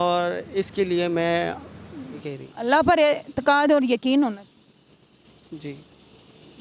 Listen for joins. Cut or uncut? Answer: cut